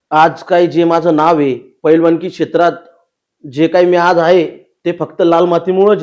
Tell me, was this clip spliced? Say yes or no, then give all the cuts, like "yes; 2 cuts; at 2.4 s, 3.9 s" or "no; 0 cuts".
no; 0 cuts